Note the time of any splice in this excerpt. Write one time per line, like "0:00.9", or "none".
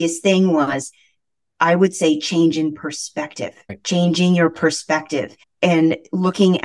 0:03.7
0:05.4